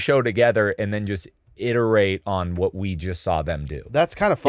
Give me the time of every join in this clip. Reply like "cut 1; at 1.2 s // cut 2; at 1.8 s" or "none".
none